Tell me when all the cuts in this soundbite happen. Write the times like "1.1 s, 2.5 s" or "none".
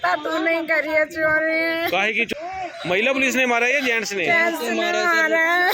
2.3 s